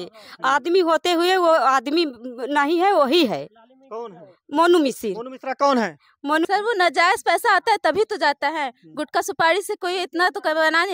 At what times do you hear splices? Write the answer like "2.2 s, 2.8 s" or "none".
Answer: 6.4 s